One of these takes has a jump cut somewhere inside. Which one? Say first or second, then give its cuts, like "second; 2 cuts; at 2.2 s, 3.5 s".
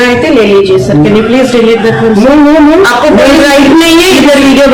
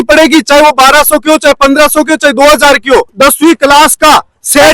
second; 1 cut; at 3.1 s